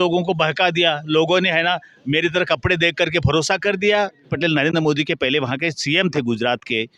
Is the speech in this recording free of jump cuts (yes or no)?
no